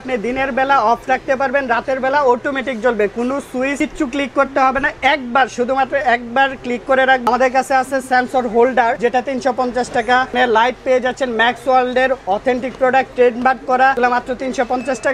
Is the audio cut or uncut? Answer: cut